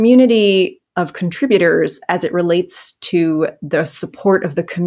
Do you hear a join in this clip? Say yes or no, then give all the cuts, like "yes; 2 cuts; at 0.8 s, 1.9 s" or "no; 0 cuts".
no; 0 cuts